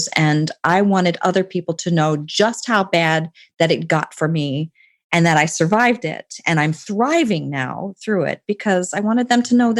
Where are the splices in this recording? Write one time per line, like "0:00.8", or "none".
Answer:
none